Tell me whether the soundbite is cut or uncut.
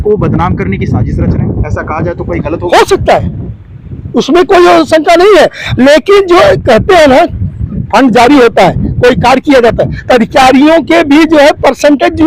uncut